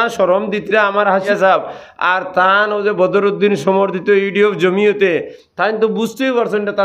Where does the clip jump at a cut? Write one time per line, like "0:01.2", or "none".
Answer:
0:01.3